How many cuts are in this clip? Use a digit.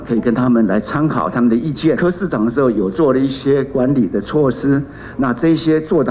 1